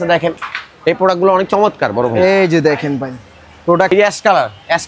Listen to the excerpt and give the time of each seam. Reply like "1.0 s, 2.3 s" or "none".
3.9 s